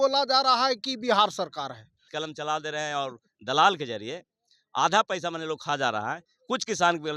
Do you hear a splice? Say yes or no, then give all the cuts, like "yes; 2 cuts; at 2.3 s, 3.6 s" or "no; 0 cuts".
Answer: yes; 1 cut; at 2.2 s